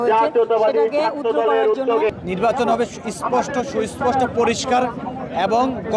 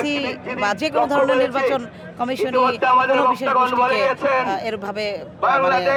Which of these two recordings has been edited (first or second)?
first